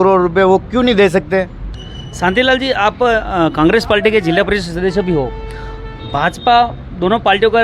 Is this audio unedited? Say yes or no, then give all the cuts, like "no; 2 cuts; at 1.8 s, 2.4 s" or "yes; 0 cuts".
yes; 0 cuts